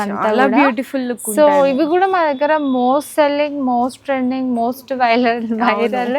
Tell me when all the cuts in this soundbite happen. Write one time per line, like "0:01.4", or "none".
none